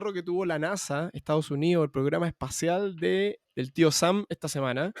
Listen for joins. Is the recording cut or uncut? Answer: cut